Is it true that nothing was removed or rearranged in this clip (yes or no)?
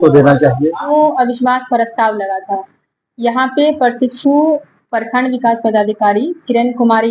no